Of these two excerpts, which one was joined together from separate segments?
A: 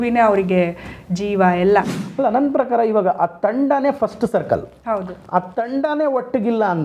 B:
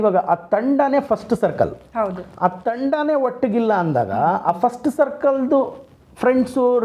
A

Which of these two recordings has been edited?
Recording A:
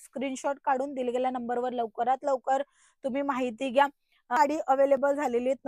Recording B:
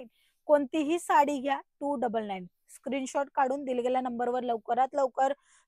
A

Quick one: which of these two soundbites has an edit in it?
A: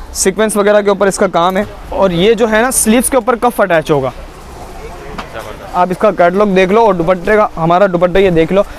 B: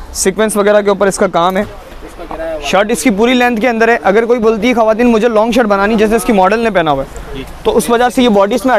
A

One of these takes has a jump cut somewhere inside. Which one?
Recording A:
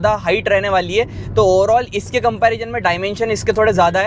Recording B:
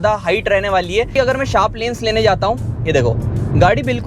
B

